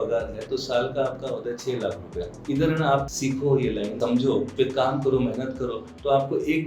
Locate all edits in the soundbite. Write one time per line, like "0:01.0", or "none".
0:02.3
0:03.1
0:04.2